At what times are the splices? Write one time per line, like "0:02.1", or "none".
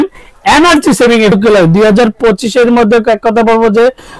0:01.3